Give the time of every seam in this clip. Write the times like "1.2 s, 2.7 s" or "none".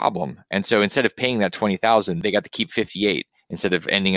2.2 s